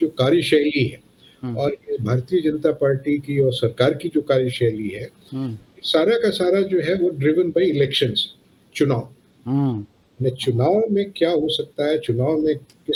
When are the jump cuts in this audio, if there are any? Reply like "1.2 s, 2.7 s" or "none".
none